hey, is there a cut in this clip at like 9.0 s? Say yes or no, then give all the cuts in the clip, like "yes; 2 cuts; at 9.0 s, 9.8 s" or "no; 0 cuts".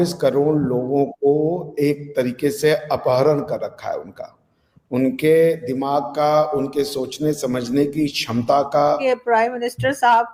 yes; 1 cut; at 9.0 s